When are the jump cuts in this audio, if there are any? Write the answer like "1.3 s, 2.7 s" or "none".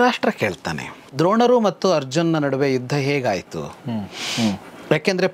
1.0 s